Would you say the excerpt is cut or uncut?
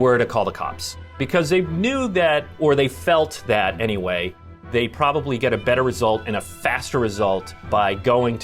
cut